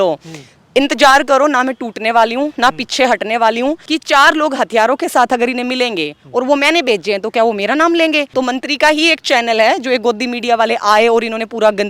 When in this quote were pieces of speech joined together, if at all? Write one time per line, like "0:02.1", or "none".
0:03.8
0:08.3